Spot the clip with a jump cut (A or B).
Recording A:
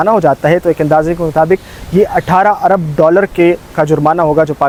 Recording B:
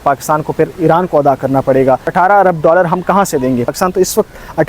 B